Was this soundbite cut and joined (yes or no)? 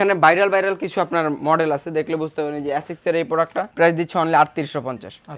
no